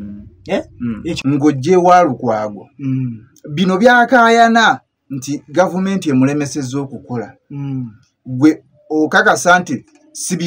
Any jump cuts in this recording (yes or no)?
yes